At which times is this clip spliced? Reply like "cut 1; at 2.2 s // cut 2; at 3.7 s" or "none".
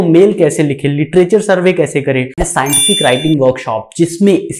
cut 1; at 2.4 s